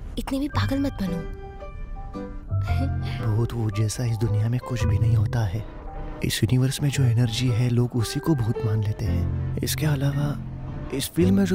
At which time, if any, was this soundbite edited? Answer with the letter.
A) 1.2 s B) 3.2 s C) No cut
B